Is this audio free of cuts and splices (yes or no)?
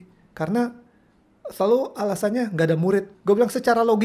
no